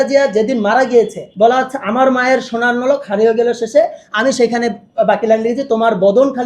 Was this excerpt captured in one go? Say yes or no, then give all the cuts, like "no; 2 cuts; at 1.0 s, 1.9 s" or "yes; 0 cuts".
no; 1 cut; at 1.2 s